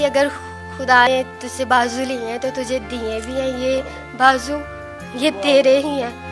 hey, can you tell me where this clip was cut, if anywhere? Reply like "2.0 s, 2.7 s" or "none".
1.1 s